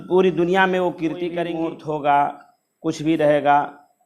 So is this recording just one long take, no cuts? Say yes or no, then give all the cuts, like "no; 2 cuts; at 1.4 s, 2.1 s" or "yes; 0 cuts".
no; 1 cut; at 1.4 s